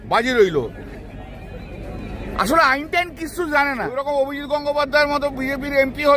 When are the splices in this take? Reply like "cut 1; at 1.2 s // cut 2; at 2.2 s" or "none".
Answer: cut 1; at 4.0 s